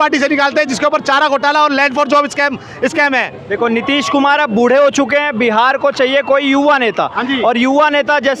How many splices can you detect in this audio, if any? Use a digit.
0